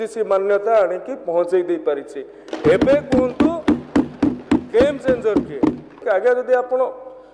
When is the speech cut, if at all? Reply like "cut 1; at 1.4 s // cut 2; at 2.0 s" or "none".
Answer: cut 1; at 5.9 s